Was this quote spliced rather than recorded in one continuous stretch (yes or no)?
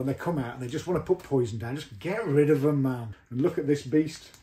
yes